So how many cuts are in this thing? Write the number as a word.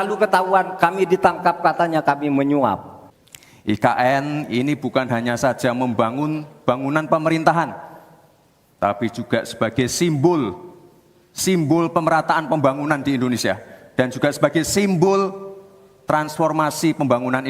one